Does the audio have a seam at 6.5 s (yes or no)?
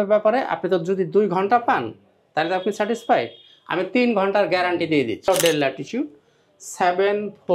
no